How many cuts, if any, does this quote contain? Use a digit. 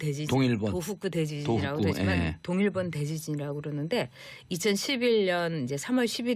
1